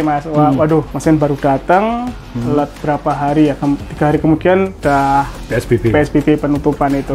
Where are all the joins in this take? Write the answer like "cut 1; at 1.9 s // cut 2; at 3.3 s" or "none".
cut 1; at 0.9 s // cut 2; at 4.7 s